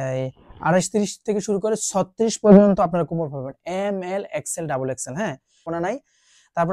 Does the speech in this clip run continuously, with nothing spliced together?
no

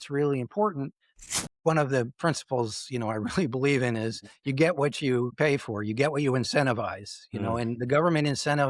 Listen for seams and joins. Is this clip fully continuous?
no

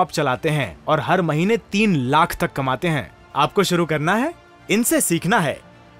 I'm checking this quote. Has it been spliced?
no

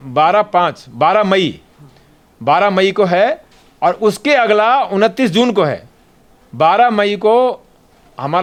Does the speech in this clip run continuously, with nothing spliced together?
yes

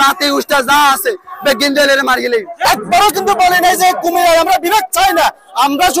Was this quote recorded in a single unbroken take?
no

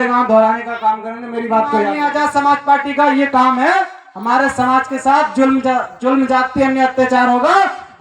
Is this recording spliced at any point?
yes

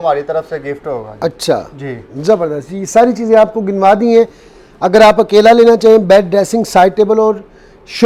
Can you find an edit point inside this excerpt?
no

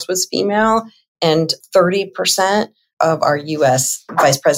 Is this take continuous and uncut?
yes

